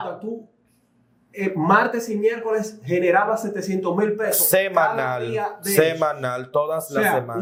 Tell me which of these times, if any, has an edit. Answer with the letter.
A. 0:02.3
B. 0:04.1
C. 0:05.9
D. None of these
D